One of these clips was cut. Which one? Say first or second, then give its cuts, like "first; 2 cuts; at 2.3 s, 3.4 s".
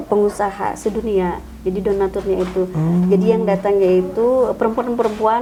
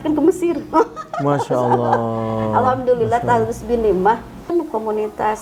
second; 1 cut; at 4.4 s